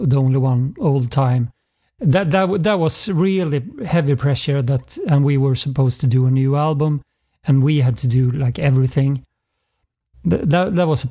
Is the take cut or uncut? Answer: uncut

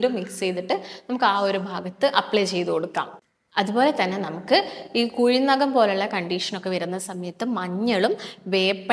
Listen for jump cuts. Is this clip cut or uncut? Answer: uncut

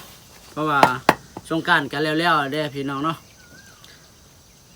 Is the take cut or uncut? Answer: uncut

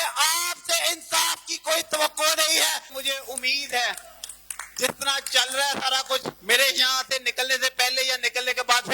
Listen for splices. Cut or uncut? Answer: cut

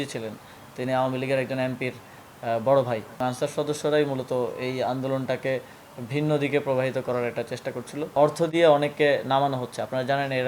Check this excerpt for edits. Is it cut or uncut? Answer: cut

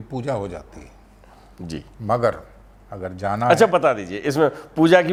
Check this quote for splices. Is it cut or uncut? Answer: uncut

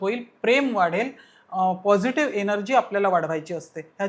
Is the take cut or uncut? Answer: uncut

